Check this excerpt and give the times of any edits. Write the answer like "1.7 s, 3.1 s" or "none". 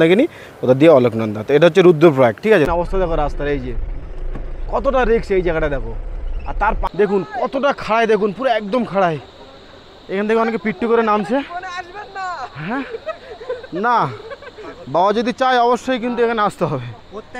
2.7 s, 6.8 s